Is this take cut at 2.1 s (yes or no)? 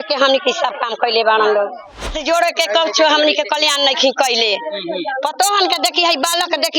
yes